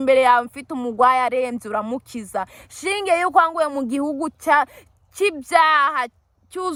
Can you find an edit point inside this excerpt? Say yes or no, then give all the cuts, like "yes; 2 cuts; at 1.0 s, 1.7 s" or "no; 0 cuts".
no; 0 cuts